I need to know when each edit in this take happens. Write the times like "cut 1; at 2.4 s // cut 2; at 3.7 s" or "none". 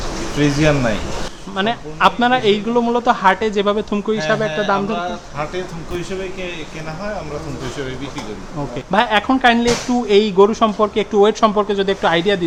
none